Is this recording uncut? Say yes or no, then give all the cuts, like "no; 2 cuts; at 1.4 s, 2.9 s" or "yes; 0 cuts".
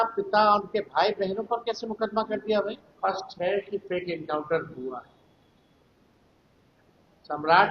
no; 1 cut; at 2.9 s